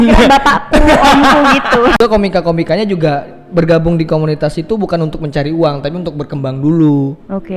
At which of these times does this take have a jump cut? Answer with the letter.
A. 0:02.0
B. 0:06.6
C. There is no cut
A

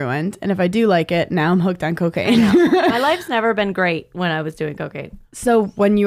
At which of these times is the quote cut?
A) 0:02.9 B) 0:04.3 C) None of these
A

